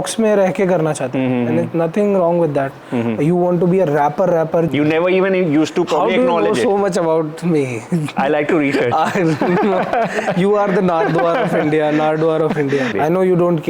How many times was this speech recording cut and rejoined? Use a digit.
2